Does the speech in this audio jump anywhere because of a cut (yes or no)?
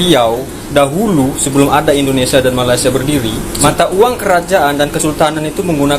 yes